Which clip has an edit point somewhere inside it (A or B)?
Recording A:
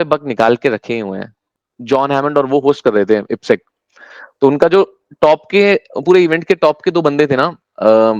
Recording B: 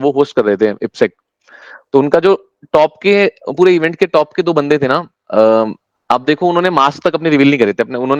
A